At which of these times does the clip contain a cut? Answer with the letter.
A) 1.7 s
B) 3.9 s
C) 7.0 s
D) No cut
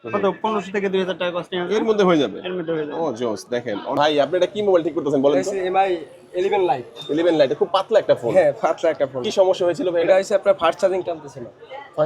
B